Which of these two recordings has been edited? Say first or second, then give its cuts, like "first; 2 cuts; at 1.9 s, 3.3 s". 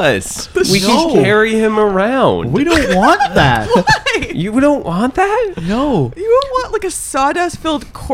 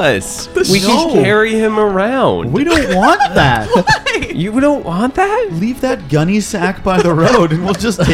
second; 1 cut; at 5.5 s